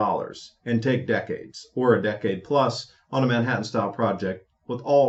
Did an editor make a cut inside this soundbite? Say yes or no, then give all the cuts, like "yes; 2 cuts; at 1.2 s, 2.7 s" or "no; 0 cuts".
no; 0 cuts